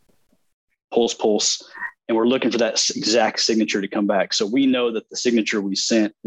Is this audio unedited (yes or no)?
yes